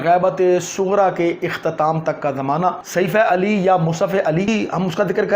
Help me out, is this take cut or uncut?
cut